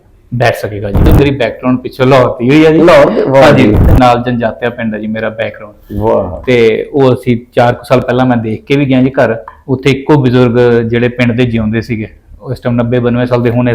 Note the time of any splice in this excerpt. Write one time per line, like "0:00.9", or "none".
0:01.1
0:03.9